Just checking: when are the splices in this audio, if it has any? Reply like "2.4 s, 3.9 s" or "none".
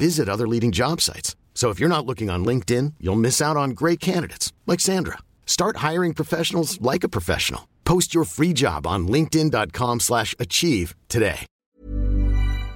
11.5 s